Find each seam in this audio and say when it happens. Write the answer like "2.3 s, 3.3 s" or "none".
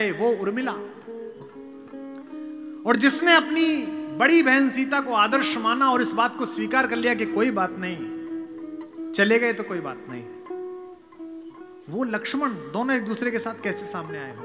none